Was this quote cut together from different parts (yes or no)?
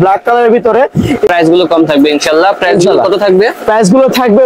yes